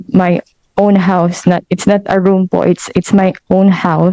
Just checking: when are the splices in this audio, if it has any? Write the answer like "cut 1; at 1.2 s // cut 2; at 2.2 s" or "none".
none

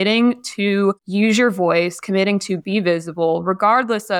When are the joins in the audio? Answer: cut 1; at 1.0 s

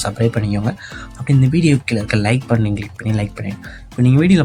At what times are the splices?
none

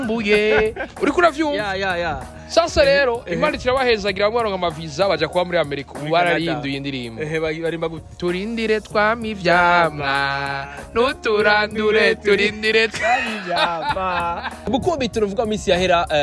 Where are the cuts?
cut 1; at 14.6 s

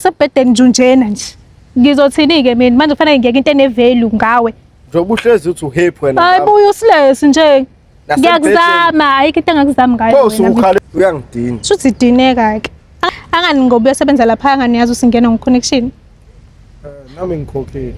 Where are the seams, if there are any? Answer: cut 1; at 13.1 s

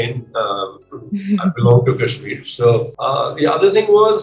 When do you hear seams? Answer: cut 1; at 2.9 s

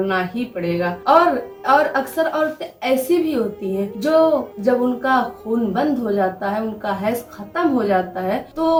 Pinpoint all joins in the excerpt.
none

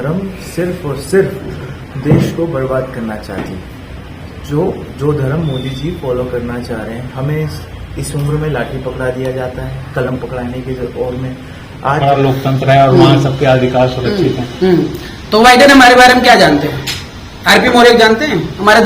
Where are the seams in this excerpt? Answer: cut 1; at 12.0 s

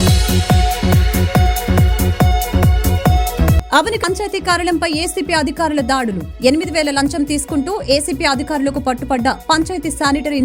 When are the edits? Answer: none

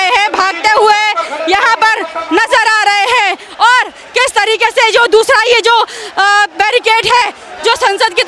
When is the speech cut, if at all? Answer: none

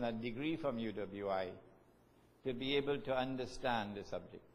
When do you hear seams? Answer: cut 1; at 2.4 s

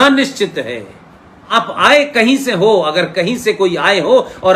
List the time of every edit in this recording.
cut 1; at 1.5 s

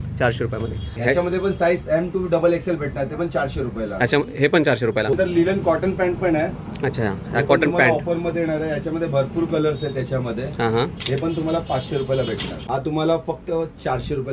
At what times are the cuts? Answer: cut 1; at 1.0 s // cut 2; at 5.1 s // cut 3; at 12.5 s

